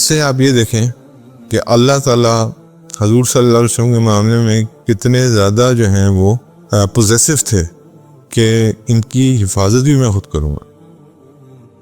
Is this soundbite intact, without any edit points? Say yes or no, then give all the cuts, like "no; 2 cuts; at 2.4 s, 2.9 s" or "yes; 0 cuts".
no; 2 cuts; at 6.5 s, 11.1 s